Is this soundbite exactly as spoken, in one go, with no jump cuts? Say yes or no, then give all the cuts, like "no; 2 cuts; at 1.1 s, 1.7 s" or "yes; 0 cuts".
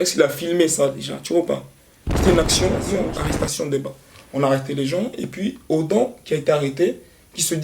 no; 1 cut; at 2.9 s